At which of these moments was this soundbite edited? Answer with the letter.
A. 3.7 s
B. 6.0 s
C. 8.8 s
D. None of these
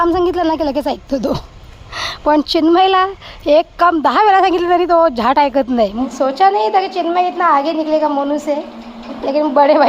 B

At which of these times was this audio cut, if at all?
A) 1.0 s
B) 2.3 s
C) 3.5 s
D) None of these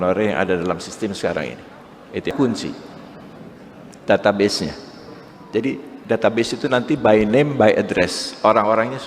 B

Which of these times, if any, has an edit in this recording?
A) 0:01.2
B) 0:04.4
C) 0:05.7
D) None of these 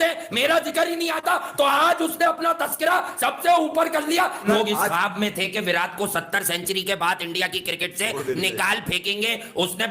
B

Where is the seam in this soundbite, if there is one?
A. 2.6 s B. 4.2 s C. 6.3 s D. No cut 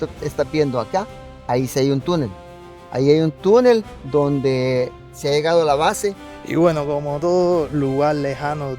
C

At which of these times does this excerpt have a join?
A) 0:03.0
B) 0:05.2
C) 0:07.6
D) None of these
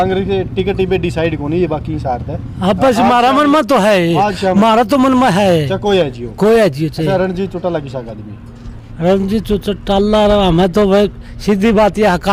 D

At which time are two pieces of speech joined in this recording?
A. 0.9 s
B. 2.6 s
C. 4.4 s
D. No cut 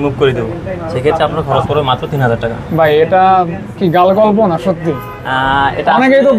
D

